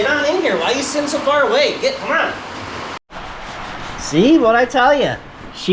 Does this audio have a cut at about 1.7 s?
no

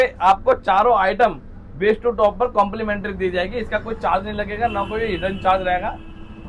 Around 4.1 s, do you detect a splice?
no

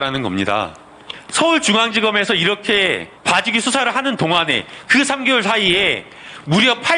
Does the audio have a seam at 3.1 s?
yes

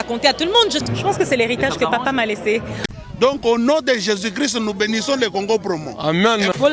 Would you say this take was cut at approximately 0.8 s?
yes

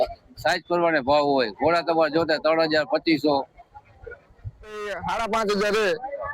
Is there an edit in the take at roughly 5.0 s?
yes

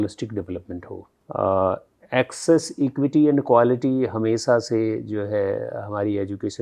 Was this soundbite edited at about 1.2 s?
yes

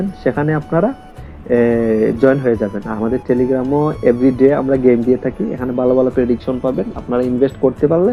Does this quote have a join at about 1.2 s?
no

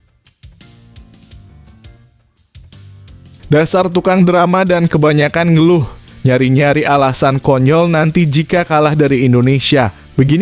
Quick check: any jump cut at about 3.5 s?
yes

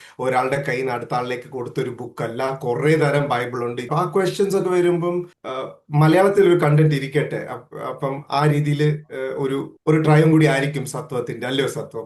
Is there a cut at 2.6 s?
no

